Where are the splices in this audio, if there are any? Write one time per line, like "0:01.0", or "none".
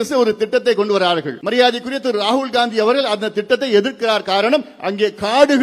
0:01.4